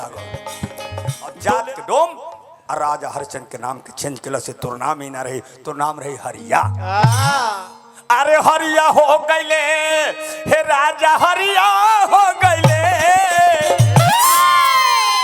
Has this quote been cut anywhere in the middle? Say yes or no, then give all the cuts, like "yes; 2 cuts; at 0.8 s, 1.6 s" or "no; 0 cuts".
yes; 1 cut; at 1.2 s